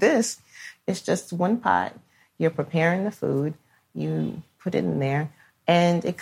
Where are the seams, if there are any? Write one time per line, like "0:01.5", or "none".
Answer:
none